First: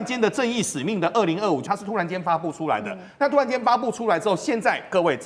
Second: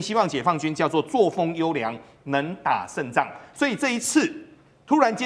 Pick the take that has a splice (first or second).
first